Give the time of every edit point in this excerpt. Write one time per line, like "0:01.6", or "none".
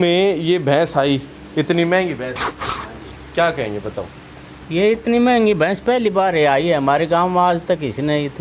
none